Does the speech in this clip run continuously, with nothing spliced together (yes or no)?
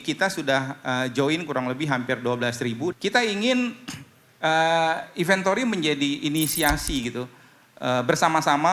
no